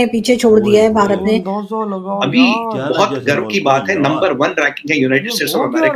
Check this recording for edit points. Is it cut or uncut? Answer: cut